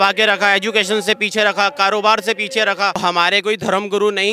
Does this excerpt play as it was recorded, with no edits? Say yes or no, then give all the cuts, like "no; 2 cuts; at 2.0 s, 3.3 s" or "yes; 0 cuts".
no; 1 cut; at 3.0 s